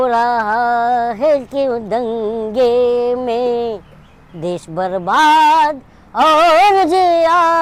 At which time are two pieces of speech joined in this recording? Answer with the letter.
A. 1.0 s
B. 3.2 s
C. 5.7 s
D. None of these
D